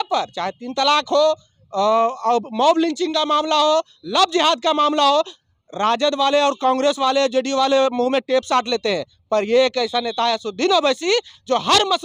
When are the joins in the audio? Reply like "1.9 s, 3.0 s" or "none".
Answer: none

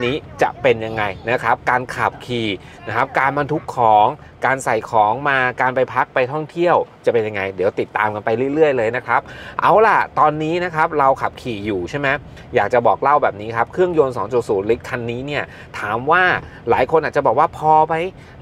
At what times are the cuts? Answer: none

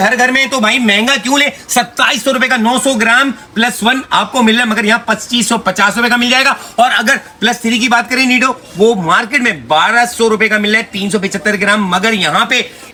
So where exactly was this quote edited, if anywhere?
none

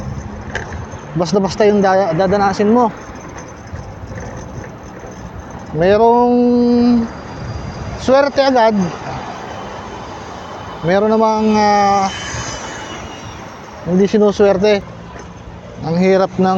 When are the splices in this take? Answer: 14.8 s

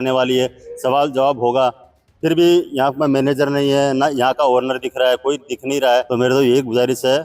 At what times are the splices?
6.1 s

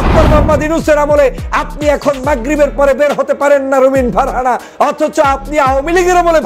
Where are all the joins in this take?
none

